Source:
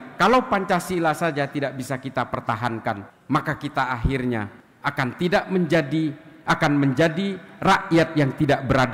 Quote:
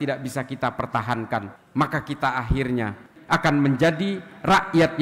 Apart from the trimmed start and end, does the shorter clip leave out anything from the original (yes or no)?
yes